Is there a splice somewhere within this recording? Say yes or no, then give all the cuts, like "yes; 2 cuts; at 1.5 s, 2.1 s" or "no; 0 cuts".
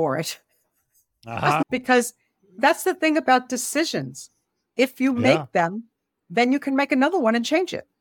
yes; 1 cut; at 1.6 s